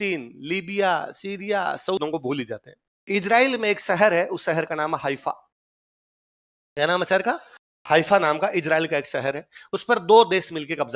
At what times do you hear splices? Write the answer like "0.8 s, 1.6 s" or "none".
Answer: 2.0 s